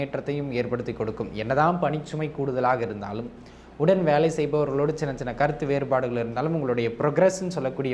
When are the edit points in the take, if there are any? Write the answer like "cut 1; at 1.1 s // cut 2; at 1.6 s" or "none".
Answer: none